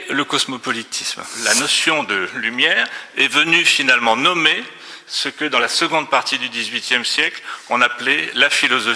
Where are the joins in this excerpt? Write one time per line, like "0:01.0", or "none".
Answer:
0:01.3